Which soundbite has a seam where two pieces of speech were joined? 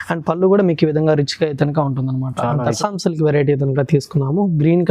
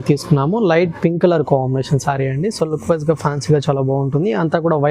first; 1 cut; at 2.8 s

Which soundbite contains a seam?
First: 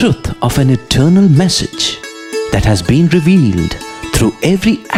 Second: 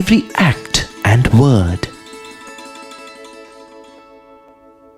second; 1 cut; at 1.9 s

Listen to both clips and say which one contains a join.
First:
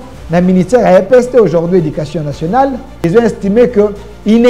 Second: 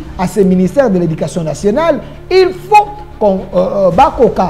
first; 1 cut; at 2.9 s

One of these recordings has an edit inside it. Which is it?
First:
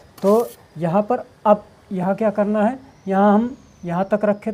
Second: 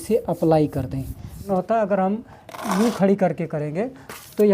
second; 1 cut; at 1.4 s

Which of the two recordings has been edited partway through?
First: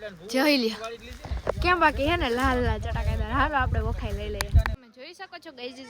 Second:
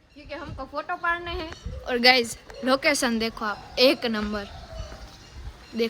first; 1 cut; at 4.9 s

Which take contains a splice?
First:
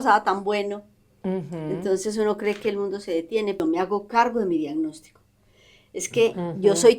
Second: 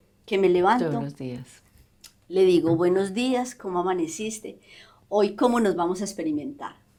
first; 1 cut; at 3.6 s

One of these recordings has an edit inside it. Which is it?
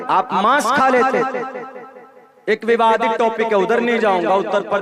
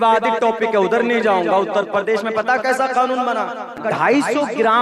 second; 1 cut; at 3.8 s

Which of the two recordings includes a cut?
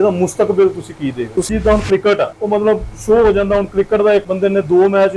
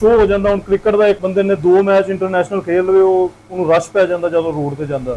first; 1 cut; at 1.5 s

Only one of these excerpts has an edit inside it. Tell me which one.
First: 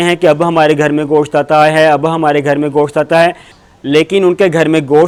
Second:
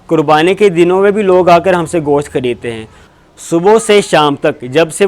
second; 1 cut; at 3.1 s

